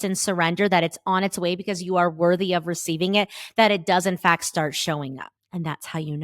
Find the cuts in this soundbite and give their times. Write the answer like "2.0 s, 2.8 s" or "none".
5.3 s